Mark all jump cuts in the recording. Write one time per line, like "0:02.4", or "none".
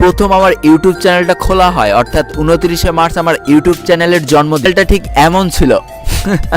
0:04.7